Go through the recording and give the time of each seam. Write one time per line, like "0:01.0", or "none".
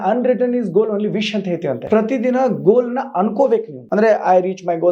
0:01.8
0:03.8